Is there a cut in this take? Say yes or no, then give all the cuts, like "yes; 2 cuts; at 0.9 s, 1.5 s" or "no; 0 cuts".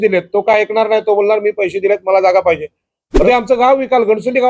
yes; 1 cut; at 3.2 s